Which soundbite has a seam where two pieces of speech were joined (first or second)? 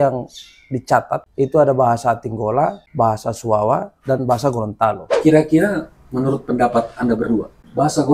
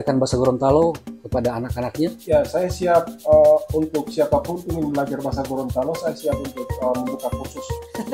first